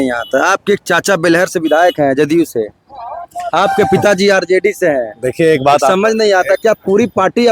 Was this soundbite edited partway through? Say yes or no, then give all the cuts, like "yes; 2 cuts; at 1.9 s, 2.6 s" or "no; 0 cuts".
no; 0 cuts